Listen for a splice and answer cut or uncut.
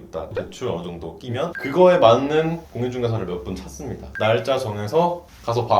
cut